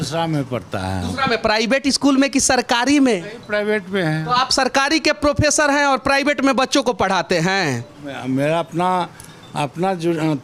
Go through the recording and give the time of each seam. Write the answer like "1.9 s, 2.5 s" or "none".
none